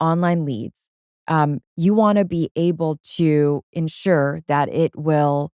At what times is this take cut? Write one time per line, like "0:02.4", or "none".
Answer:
none